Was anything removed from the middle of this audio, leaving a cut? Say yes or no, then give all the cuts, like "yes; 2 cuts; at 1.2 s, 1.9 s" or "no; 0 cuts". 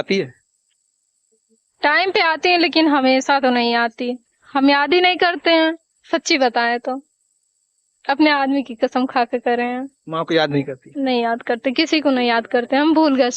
no; 0 cuts